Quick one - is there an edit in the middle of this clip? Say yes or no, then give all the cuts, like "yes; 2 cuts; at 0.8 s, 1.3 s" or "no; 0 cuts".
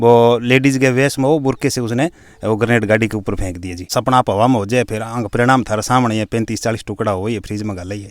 yes; 1 cut; at 3.9 s